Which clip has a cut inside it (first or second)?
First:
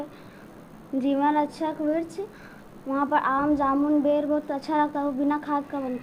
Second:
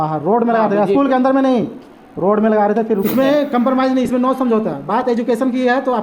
second